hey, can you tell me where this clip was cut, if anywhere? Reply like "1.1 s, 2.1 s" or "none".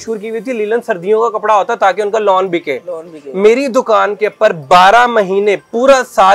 none

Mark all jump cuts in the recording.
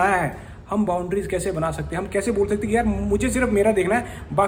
none

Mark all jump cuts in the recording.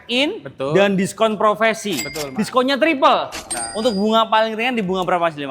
3.5 s

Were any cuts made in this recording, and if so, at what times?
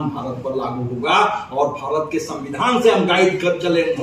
none

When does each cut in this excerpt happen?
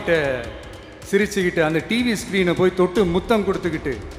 none

